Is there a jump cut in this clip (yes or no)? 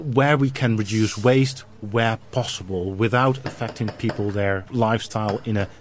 yes